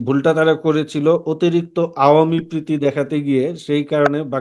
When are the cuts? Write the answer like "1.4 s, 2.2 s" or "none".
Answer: none